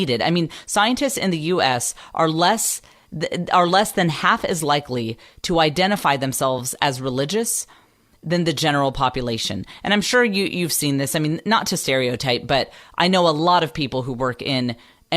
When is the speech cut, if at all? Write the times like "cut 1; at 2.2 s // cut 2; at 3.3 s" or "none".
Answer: cut 1; at 12.7 s